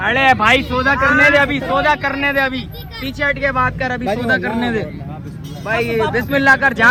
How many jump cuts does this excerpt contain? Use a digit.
0